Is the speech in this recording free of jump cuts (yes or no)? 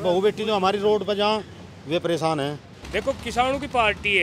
no